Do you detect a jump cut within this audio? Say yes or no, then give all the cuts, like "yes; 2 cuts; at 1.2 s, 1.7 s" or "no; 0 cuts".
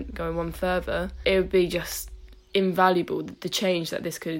yes; 2 cuts; at 1.1 s, 3.4 s